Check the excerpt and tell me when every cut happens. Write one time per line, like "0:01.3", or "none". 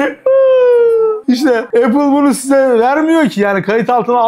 0:01.3